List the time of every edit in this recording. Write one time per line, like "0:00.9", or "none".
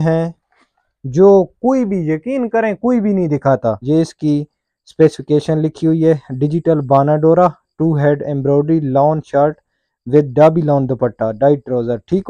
0:03.8